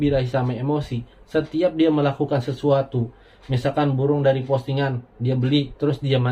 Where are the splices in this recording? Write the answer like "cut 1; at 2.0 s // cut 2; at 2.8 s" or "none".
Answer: none